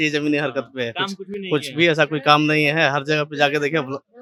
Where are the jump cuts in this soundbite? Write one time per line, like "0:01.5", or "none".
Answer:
none